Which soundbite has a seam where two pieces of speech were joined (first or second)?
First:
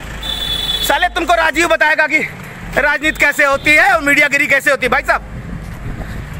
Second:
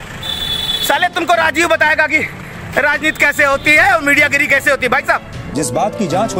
second